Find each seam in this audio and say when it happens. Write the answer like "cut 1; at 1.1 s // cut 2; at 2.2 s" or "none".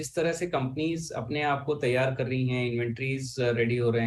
none